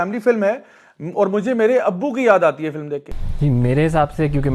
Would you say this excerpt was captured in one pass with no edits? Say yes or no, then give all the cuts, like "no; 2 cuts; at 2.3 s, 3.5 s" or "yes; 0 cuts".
yes; 0 cuts